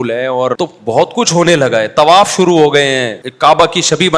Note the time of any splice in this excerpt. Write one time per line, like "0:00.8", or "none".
0:01.1
0:03.2